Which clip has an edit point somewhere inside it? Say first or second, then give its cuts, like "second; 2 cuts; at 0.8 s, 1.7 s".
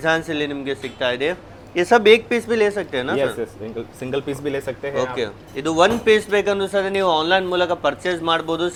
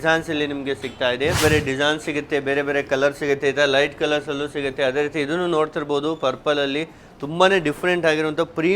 second; 1 cut; at 1.4 s